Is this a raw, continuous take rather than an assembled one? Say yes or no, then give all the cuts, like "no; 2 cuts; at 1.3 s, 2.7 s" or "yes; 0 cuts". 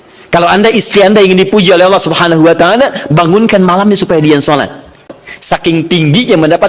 no; 1 cut; at 5.1 s